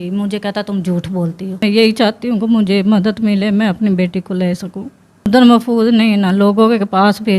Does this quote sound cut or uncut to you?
cut